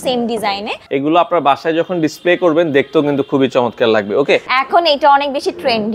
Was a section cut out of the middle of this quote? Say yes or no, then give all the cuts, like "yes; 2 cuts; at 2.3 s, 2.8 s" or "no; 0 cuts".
yes; 2 cuts; at 0.8 s, 4.5 s